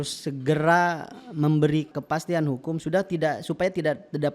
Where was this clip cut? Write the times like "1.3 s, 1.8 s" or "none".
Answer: 1.9 s